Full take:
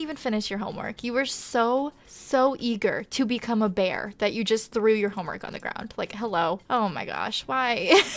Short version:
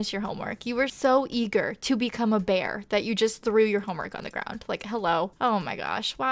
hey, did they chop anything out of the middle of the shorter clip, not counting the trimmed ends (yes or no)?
yes